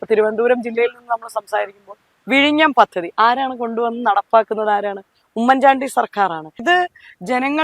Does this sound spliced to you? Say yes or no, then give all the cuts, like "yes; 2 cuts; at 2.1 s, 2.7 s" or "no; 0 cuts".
yes; 1 cut; at 6.6 s